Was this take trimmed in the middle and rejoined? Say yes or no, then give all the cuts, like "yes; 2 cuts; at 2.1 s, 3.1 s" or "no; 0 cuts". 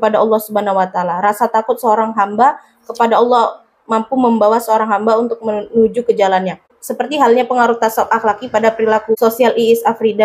yes; 1 cut; at 9.1 s